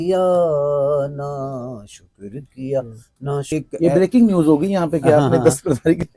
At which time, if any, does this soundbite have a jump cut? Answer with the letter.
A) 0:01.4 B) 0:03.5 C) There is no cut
B